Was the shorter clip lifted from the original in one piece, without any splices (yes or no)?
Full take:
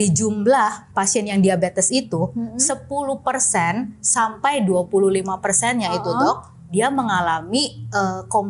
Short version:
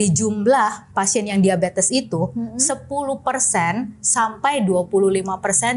yes